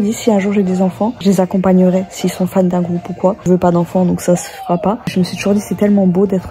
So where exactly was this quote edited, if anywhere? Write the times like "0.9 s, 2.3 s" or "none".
1.2 s, 3.5 s, 5.1 s

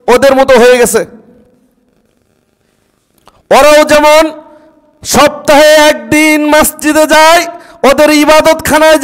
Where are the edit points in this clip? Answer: none

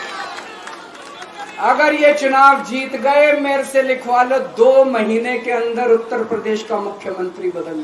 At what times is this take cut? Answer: none

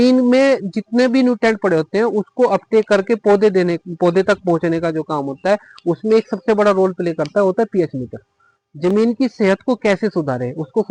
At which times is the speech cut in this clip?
none

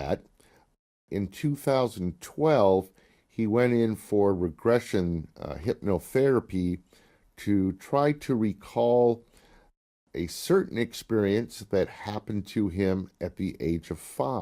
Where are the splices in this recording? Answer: 1.0 s

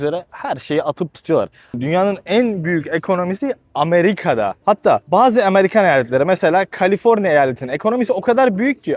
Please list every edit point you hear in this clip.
1.8 s

